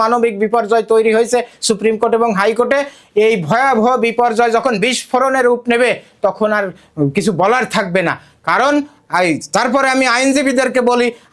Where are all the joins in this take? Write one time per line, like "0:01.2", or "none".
none